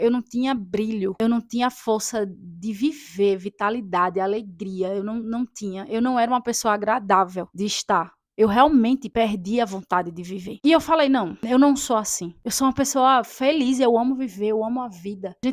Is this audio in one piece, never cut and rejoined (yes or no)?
yes